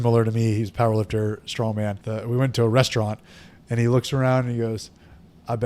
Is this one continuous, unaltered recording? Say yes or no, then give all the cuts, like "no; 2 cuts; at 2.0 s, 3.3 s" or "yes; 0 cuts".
no; 1 cut; at 2.0 s